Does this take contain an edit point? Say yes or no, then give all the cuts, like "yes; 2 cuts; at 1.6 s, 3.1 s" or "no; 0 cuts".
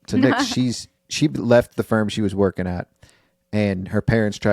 yes; 1 cut; at 1.0 s